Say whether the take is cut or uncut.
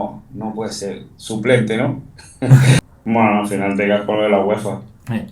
cut